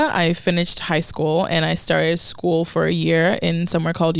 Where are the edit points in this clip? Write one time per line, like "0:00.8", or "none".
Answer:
none